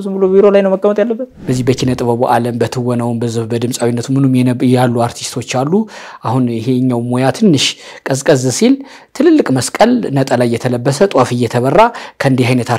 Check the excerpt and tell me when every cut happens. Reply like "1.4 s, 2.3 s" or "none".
1.3 s